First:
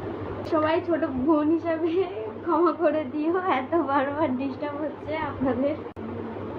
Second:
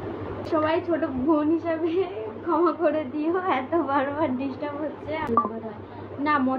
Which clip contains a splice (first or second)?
second